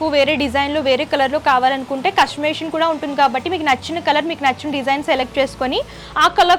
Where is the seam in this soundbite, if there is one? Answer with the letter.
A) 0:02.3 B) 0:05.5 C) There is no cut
C